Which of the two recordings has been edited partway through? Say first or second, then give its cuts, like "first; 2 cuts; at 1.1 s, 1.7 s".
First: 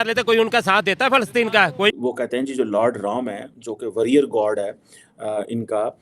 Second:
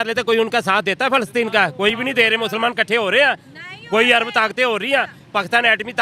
first; 1 cut; at 2.0 s